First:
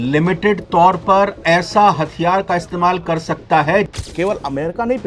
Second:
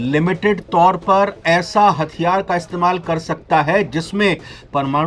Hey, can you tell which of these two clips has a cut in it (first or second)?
first